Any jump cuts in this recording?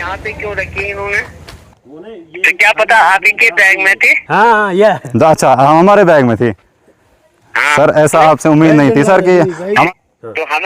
yes; 3 cuts; at 1.7 s, 4.1 s, 9.9 s

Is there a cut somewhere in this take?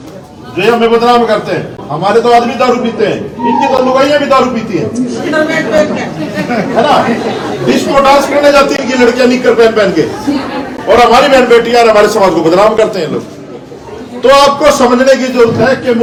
no; 0 cuts

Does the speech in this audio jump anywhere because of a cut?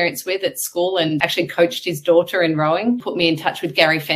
yes; 2 cuts; at 1.2 s, 3.1 s

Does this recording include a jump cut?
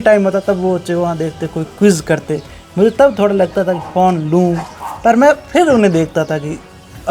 no; 0 cuts

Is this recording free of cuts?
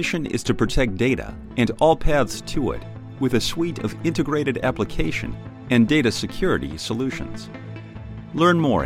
yes; 0 cuts

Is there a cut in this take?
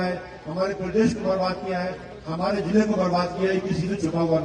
no; 0 cuts

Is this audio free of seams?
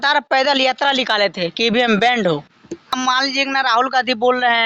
no; 1 cut; at 3.0 s

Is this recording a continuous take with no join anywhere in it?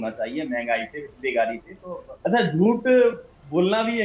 no; 1 cut; at 2.3 s

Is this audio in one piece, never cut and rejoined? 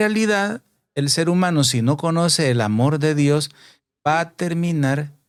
yes; 0 cuts

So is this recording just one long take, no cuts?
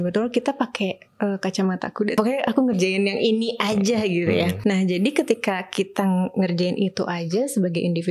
no; 2 cuts; at 2.1 s, 4.5 s

